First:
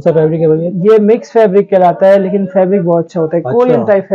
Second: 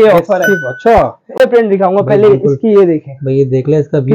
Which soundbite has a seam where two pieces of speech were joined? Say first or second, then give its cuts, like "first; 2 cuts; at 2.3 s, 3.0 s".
second; 1 cut; at 1.4 s